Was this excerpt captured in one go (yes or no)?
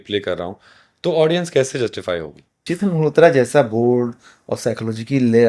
no